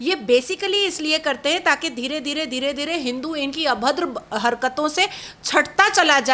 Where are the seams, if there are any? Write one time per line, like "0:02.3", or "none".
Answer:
none